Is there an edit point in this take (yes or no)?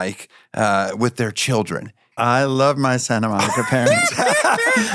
no